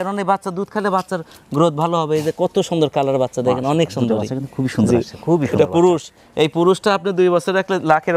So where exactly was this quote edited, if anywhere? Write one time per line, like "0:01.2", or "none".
none